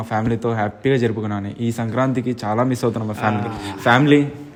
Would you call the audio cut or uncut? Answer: uncut